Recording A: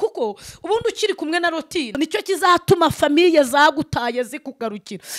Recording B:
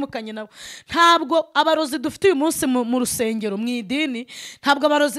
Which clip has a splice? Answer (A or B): A